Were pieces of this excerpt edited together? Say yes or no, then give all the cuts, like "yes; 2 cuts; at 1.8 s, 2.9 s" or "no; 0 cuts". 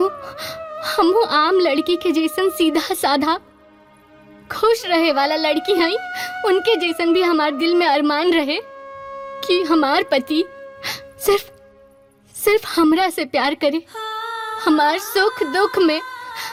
no; 0 cuts